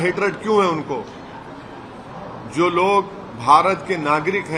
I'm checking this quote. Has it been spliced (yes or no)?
no